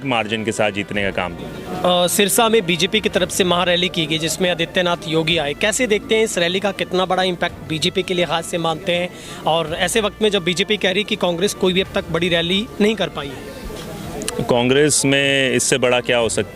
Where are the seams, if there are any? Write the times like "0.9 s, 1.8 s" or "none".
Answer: 1.3 s